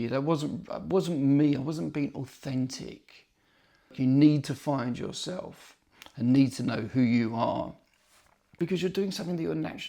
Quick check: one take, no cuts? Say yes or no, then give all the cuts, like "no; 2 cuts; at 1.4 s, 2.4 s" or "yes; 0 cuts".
no; 2 cuts; at 3.9 s, 8.5 s